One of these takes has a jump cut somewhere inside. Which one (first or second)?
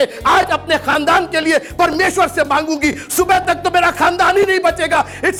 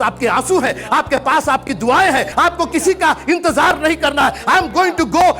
second